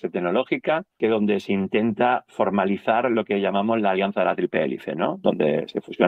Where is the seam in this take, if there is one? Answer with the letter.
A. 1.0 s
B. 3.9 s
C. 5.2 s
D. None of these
A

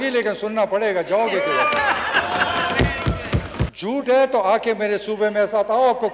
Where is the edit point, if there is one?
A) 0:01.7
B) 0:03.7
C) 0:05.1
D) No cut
B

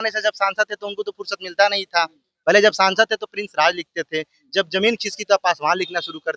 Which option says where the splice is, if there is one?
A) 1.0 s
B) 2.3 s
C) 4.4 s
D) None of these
B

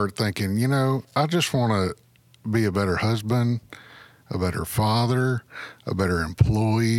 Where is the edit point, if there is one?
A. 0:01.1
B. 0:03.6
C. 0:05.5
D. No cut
A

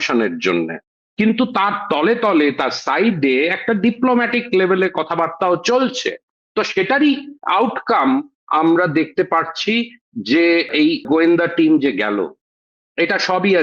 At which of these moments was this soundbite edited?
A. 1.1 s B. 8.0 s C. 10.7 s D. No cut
C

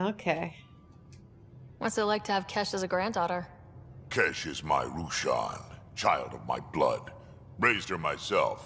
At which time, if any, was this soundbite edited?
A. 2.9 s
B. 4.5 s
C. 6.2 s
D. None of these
A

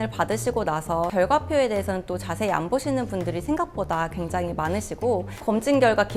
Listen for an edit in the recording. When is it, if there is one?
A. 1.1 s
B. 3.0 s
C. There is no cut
A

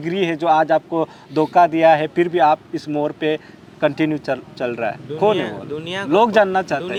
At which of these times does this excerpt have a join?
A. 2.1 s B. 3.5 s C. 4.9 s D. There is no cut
D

